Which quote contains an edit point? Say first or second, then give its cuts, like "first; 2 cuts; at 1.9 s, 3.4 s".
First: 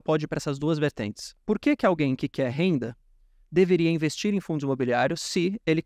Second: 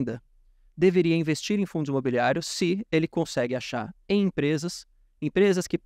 first; 1 cut; at 1.3 s